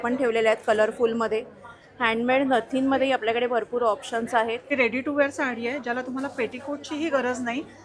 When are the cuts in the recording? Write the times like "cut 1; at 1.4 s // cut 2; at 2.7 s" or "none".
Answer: cut 1; at 4.7 s